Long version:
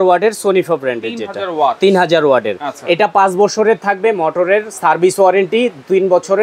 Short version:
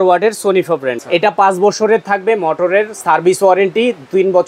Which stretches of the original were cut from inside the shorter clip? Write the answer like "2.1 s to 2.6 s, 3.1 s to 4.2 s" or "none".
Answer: 1.0 s to 2.8 s